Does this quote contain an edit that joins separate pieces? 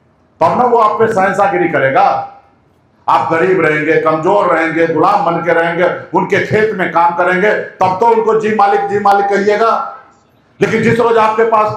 no; 0 cuts

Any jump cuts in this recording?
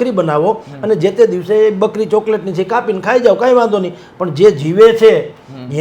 no; 0 cuts

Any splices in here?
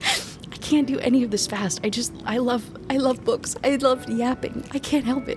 no; 0 cuts

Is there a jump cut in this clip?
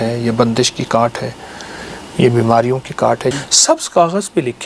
yes; 1 cut; at 3.3 s

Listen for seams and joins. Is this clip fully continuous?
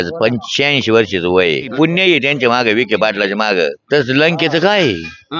no; 2 cuts; at 1.7 s, 3.8 s

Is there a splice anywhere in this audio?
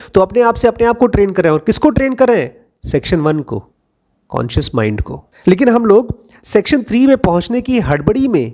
no; 0 cuts

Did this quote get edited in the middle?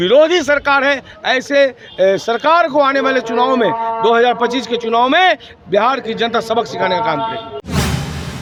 no; 0 cuts

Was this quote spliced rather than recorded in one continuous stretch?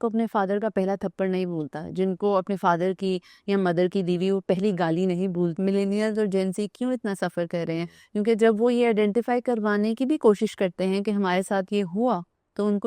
yes; 1 cut; at 5.5 s

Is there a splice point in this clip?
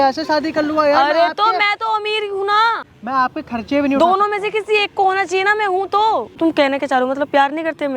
yes; 2 cuts; at 2.9 s, 6.3 s

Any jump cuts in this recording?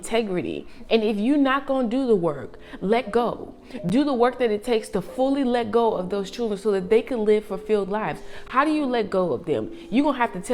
no; 0 cuts

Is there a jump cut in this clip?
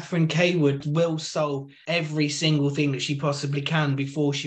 yes; 2 cuts; at 0.8 s, 1.7 s

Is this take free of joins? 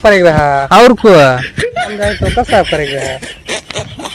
no; 1 cut; at 3.2 s

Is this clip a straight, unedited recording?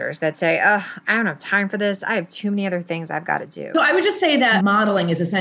no; 2 cuts; at 3.7 s, 4.5 s

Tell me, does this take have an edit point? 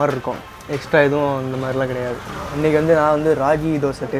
no; 0 cuts

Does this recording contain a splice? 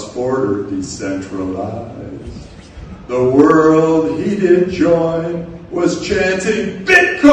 yes; 1 cut; at 3.7 s

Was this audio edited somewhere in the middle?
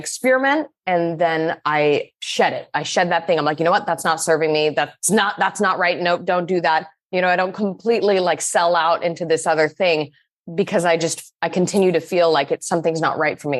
no; 0 cuts

